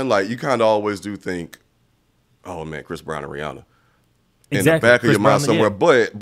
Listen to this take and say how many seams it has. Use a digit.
0